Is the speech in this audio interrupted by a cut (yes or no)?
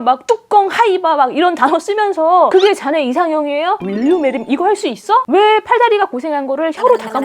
yes